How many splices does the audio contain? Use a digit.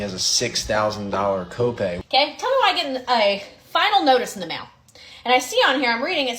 1